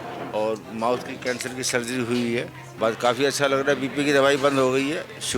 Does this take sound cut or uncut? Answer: cut